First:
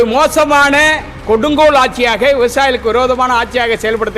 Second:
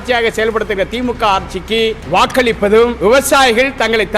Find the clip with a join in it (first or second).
second